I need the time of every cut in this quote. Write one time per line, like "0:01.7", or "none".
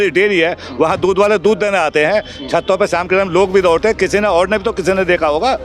none